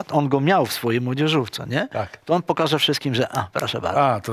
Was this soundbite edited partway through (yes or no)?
no